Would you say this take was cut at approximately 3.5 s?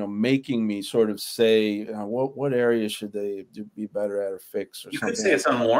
no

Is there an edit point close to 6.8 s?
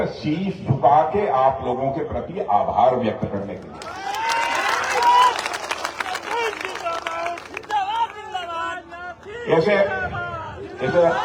no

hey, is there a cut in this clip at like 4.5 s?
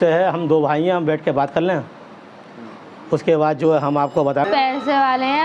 yes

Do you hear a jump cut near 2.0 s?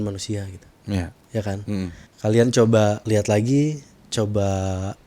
yes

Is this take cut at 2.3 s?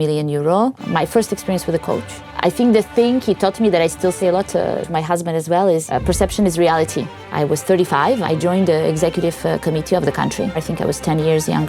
yes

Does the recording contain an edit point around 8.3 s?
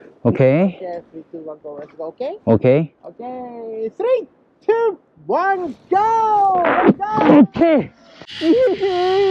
yes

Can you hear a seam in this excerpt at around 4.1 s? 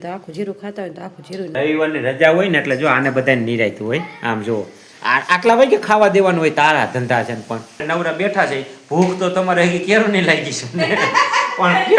no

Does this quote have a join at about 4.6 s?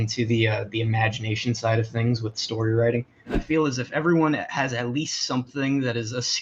no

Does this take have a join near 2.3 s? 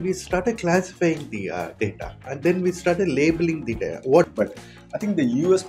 no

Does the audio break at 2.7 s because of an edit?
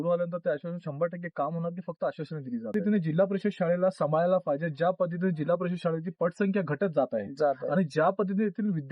yes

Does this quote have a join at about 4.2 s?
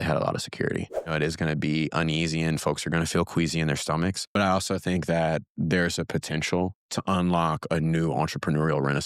yes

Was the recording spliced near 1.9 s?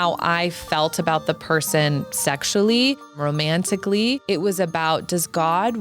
no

